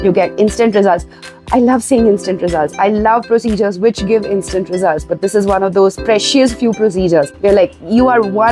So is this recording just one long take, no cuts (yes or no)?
no